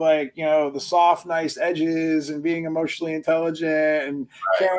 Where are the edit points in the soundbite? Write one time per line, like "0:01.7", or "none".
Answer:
none